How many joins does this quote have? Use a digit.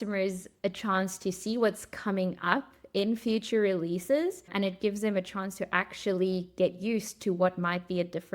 1